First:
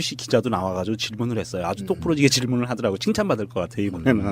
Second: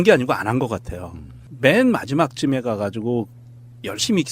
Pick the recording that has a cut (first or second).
first